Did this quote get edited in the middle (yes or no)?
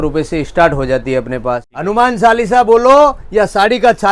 yes